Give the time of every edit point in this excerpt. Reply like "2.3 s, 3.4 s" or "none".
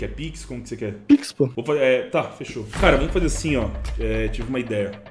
1.6 s, 2.7 s